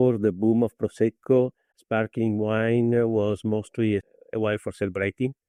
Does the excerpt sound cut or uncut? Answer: uncut